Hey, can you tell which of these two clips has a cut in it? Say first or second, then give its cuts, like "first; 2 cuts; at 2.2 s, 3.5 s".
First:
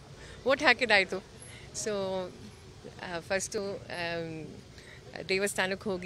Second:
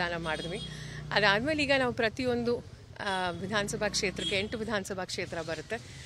first; 1 cut; at 3.5 s